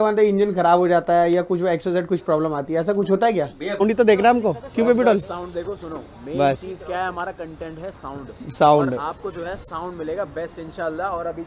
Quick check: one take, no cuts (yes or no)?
no